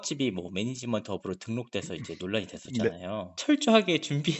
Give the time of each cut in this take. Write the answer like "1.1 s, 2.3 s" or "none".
3.3 s